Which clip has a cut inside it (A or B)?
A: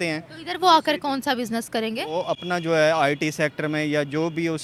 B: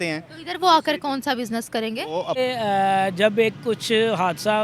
B